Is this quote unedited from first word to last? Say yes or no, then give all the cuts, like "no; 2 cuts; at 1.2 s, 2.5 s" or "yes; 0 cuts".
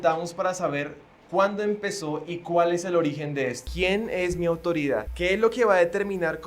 no; 2 cuts; at 3.7 s, 5.1 s